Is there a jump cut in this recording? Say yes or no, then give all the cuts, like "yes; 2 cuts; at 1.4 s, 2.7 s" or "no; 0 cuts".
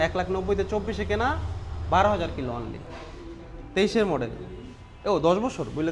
no; 0 cuts